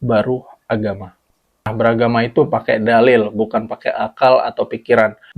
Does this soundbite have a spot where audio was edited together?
yes; 1 cut; at 1.8 s

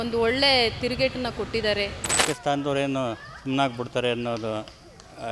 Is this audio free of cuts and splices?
no; 1 cut; at 2.2 s

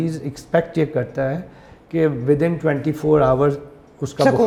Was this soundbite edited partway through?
no; 0 cuts

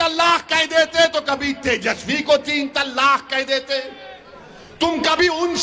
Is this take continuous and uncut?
yes; 0 cuts

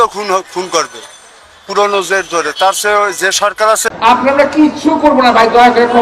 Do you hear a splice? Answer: yes; 1 cut; at 3.9 s

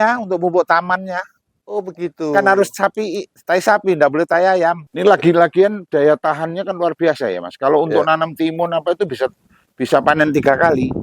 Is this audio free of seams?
no; 1 cut; at 4.9 s

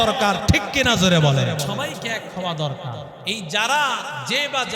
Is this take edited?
yes; 2 cuts; at 1.7 s, 3.1 s

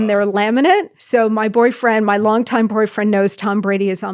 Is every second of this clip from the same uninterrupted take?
no; 1 cut; at 1.0 s

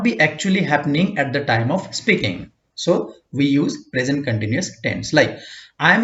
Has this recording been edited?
no; 0 cuts

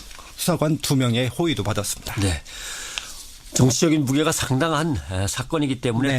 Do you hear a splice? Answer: yes; 1 cut; at 3.0 s

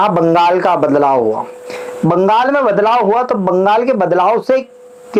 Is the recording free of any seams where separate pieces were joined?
yes; 0 cuts

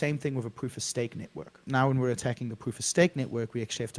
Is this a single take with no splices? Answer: no; 1 cut; at 1.6 s

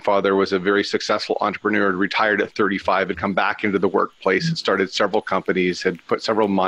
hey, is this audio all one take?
yes; 0 cuts

